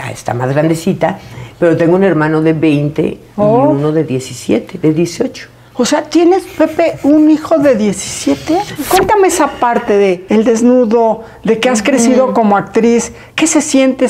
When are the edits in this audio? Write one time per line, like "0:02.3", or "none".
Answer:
0:08.7
0:10.2